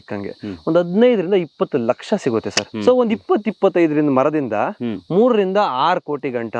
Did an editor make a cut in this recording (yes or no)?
yes